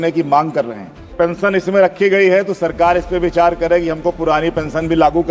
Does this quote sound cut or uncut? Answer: cut